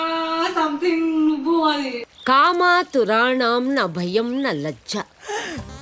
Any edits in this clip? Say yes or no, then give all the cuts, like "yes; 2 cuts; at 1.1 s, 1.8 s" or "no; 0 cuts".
no; 0 cuts